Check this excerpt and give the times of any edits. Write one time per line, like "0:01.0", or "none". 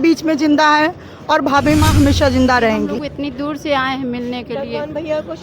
0:03.0

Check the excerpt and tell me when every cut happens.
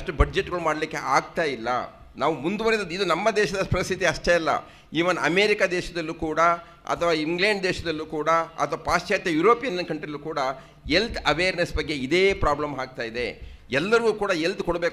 none

